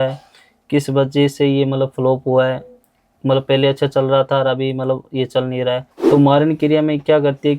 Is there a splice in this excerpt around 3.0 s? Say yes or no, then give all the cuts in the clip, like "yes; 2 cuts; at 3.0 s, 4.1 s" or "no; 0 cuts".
no; 1 cut; at 5.9 s